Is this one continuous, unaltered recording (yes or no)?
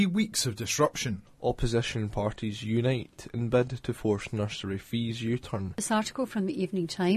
no